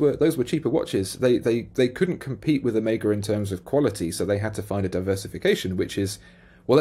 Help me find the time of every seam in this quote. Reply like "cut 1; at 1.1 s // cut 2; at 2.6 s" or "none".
none